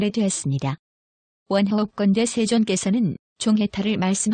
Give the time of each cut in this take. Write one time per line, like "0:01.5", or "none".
none